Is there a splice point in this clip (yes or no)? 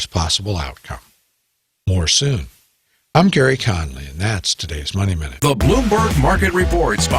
yes